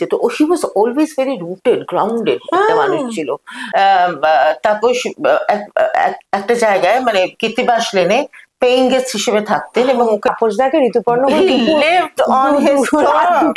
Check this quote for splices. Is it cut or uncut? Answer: cut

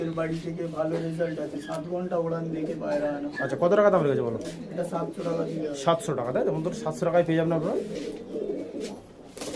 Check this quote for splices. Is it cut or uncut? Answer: uncut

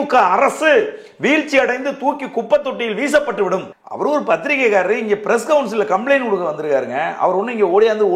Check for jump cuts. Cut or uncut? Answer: cut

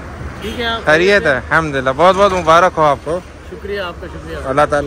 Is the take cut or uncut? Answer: uncut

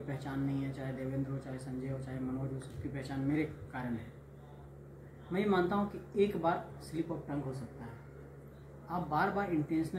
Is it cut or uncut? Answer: uncut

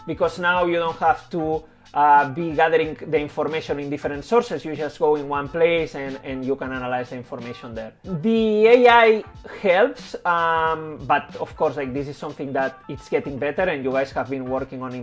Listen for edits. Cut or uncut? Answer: uncut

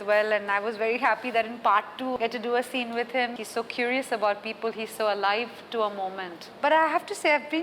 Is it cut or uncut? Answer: cut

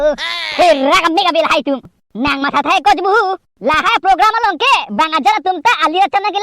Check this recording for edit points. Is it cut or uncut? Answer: cut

